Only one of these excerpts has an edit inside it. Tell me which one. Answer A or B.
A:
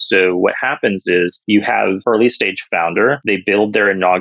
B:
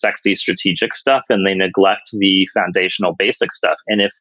A